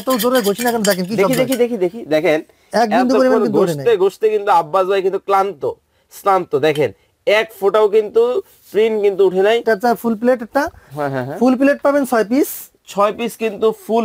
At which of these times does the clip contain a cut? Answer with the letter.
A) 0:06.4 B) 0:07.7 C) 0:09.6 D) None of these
C